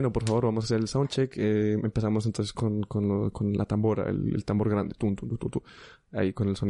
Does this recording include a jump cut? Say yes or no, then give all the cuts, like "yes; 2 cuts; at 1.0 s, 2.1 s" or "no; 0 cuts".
no; 0 cuts